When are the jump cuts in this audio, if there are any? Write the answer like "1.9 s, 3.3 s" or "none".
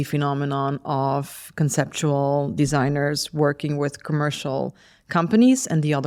none